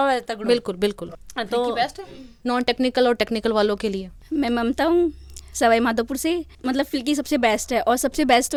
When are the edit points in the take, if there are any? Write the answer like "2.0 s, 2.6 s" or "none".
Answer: none